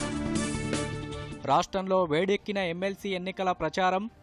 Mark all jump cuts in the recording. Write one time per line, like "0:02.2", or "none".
0:01.0